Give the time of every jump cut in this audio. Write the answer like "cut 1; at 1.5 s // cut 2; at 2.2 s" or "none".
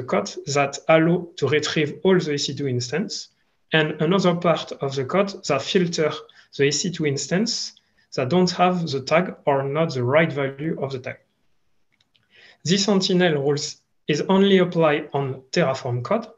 none